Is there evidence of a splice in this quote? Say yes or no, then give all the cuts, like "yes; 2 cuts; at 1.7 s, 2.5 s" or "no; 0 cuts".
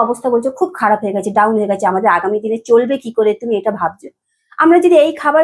no; 0 cuts